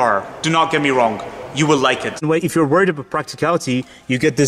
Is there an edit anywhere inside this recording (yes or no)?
yes